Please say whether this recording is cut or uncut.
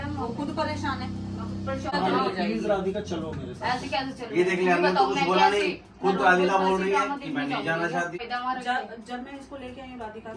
cut